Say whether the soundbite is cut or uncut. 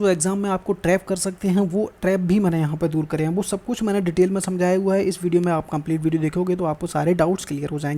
uncut